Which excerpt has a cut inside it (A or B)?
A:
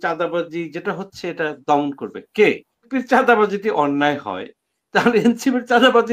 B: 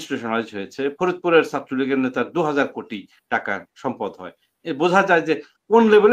A